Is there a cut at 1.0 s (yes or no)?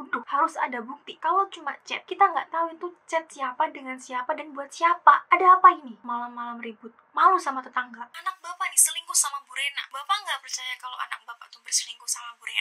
no